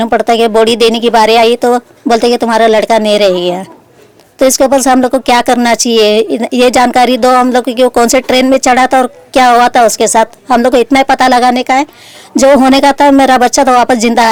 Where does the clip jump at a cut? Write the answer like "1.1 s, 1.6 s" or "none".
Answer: none